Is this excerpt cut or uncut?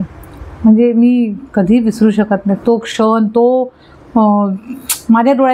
uncut